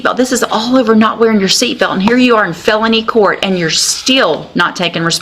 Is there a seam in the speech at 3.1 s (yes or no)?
no